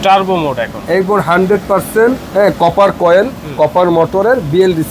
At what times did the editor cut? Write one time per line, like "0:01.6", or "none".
0:02.2